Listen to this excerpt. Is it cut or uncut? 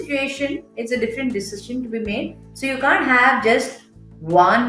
uncut